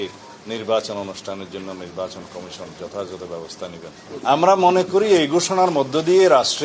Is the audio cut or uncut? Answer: cut